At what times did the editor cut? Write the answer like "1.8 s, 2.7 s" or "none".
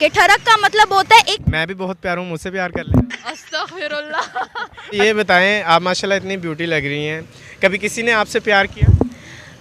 1.4 s, 5.0 s